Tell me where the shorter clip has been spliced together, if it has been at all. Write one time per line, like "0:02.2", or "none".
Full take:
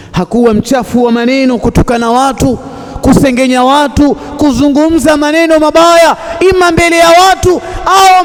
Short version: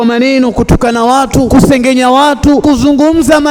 0:01.5
0:02.6